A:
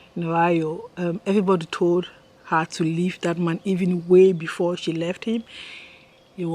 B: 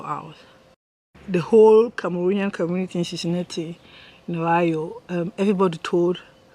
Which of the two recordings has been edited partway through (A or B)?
B